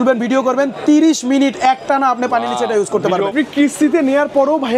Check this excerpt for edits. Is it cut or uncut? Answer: cut